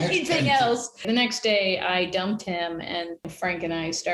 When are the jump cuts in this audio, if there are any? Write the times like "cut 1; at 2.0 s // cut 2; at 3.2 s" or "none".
cut 1; at 1.0 s // cut 2; at 3.3 s